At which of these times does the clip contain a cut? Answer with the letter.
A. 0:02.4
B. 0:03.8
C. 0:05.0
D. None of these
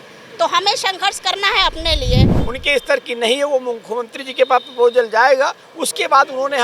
A